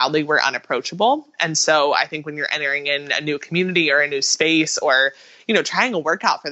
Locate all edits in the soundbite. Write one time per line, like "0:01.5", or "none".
none